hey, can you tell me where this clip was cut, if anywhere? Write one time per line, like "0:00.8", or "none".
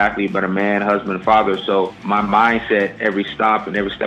0:02.0